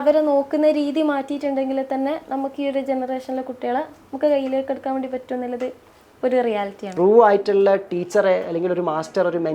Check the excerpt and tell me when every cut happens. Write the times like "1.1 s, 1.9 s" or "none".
6.9 s